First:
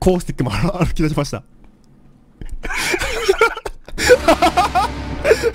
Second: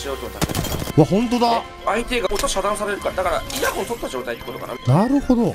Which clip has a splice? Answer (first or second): second